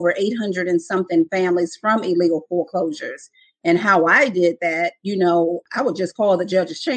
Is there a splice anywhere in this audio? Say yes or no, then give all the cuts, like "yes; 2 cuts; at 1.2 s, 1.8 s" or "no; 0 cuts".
yes; 1 cut; at 5.6 s